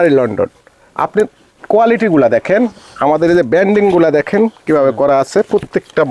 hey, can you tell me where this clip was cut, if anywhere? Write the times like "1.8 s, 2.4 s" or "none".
none